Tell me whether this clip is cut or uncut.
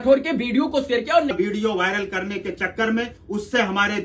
cut